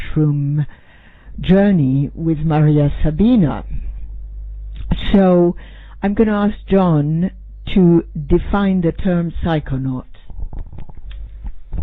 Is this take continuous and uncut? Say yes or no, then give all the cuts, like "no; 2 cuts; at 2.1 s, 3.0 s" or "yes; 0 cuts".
no; 1 cut; at 7.1 s